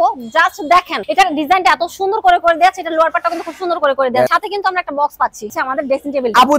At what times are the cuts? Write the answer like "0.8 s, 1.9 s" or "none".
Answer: 4.3 s, 5.5 s